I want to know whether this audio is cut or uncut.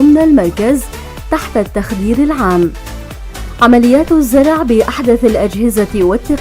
cut